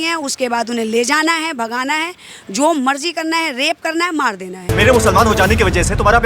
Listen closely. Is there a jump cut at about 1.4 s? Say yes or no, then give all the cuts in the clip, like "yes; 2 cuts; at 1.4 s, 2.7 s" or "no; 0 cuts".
no; 1 cut; at 4.6 s